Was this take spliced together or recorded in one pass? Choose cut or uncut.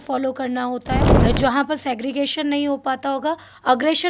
cut